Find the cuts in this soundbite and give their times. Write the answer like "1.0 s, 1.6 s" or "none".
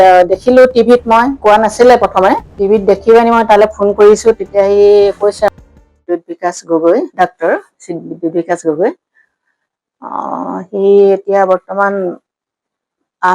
1.3 s, 2.5 s, 5.5 s